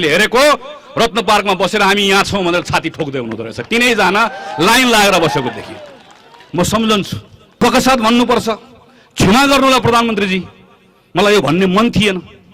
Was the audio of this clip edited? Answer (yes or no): yes